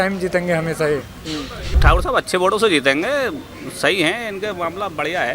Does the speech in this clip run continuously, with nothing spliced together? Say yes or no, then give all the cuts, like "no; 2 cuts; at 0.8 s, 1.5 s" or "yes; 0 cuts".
no; 1 cut; at 1.7 s